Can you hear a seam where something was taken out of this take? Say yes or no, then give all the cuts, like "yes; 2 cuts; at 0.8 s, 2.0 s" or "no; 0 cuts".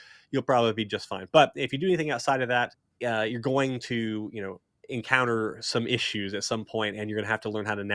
yes; 1 cut; at 2.8 s